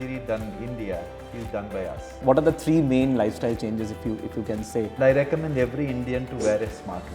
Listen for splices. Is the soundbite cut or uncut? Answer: cut